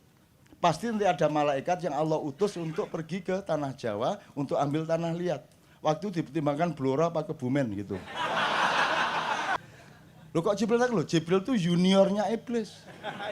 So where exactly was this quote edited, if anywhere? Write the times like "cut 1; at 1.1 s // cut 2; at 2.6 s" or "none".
cut 1; at 9.6 s

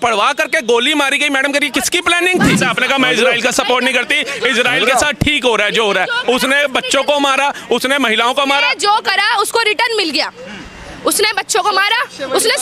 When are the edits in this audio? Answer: cut 1; at 2.6 s

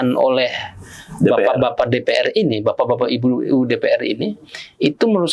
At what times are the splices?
none

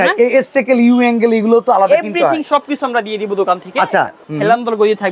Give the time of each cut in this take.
cut 1; at 4.2 s

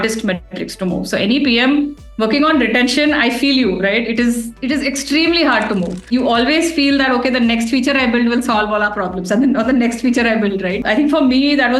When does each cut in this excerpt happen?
cut 1; at 6.1 s // cut 2; at 10.8 s

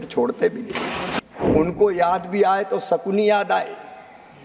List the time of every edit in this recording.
cut 1; at 1.2 s

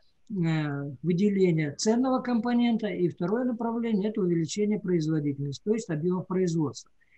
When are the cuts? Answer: none

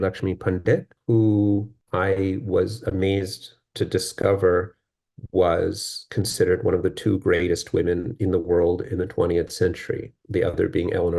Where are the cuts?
cut 1; at 0.9 s // cut 2; at 1.8 s

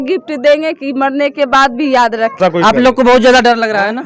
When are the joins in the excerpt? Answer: cut 1; at 2.4 s

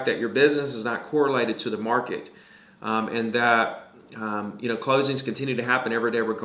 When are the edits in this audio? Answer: none

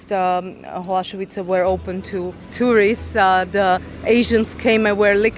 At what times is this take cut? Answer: cut 1; at 2.5 s

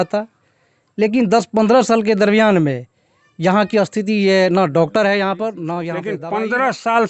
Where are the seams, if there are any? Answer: cut 1; at 6.0 s

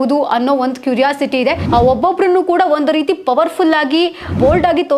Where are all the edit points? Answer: cut 1; at 1.6 s

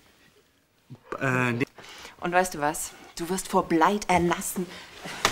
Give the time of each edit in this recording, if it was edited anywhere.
cut 1; at 3.4 s

